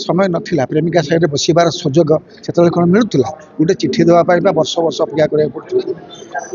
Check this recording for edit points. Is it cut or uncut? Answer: uncut